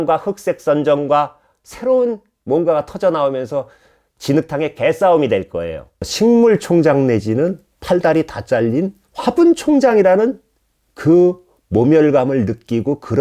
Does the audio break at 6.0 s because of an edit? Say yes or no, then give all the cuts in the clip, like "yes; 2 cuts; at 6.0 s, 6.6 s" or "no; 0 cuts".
yes; 1 cut; at 6.0 s